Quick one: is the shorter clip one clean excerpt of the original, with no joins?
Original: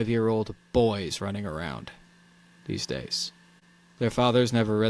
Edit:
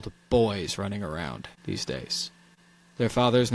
no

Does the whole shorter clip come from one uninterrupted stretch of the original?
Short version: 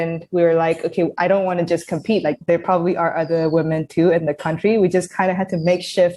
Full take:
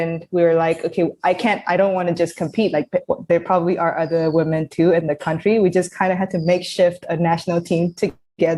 no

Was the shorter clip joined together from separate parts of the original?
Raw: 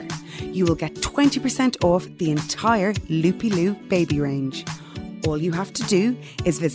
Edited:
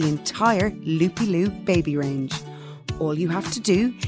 no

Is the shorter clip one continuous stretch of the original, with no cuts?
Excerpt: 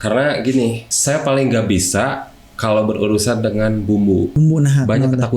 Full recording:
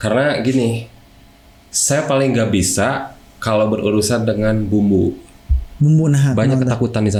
no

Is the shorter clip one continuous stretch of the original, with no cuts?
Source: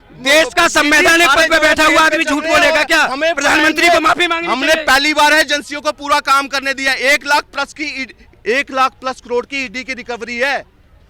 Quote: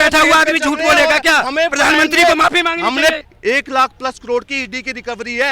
no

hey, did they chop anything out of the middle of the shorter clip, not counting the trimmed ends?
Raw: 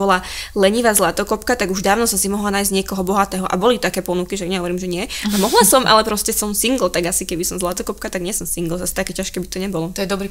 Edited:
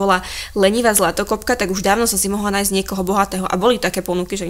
no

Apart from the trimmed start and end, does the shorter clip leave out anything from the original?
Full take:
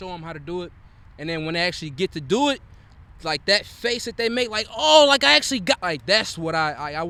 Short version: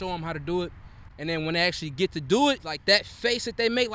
yes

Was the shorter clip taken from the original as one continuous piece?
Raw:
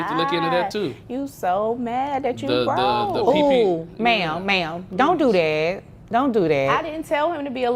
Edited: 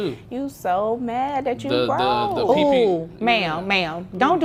yes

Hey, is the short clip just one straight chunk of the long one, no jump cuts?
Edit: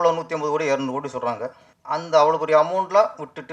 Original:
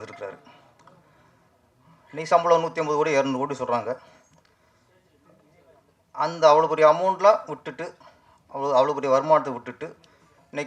no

